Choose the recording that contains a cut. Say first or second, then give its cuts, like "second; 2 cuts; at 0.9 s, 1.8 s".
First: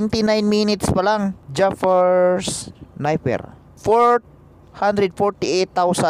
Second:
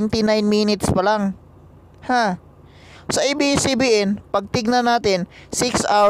first; 2 cuts; at 1.4 s, 3.7 s